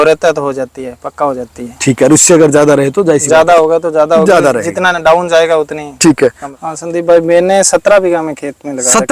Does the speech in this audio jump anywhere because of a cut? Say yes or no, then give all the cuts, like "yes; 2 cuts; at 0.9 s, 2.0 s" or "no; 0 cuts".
yes; 1 cut; at 6.5 s